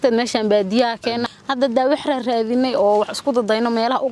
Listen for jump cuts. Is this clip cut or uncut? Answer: cut